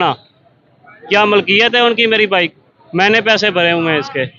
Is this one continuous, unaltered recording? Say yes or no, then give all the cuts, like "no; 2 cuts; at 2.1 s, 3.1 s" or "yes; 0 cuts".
yes; 0 cuts